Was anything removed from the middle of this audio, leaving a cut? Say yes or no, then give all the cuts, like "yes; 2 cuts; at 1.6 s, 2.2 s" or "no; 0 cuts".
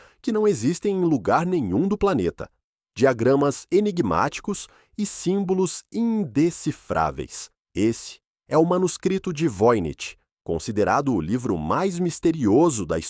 no; 0 cuts